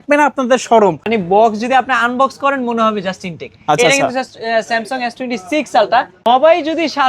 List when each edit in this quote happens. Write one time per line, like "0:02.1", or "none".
0:01.1
0:06.1

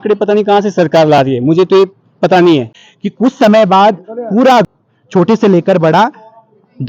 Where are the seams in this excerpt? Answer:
0:02.9
0:04.7

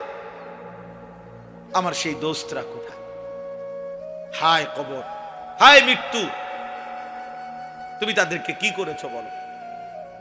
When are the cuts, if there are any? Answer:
0:09.1

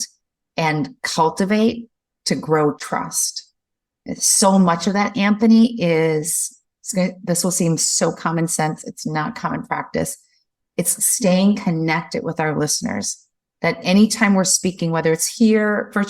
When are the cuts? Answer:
0:02.8

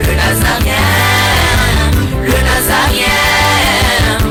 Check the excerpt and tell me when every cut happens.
none

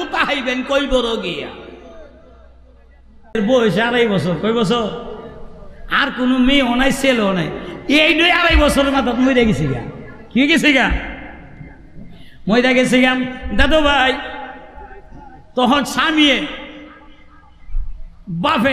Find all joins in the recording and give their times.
0:03.3

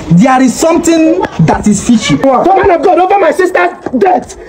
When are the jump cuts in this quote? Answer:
0:02.2

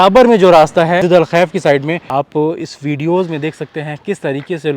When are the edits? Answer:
0:01.0
0:02.0

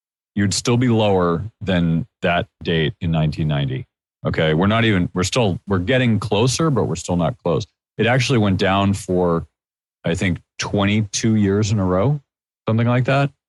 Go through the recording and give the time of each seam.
none

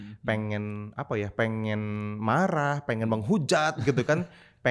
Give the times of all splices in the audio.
none

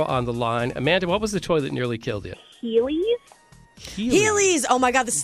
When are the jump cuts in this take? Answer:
0:02.5

